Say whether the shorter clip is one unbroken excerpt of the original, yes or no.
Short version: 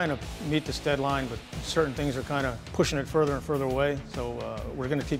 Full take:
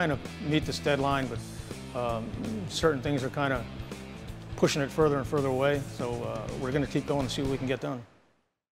no